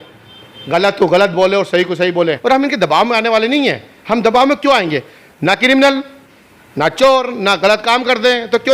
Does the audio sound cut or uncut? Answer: cut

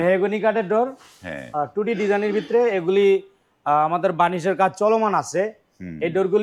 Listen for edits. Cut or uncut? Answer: uncut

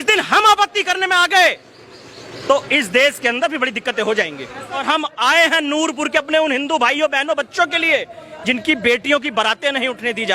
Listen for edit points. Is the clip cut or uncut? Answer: cut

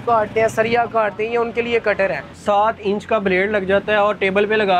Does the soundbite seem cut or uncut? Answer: cut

